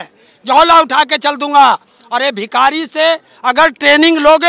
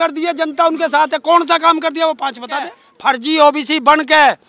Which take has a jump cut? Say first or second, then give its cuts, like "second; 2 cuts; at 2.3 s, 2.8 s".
second; 1 cut; at 2.9 s